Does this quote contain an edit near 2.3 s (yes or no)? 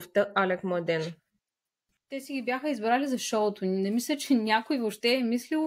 yes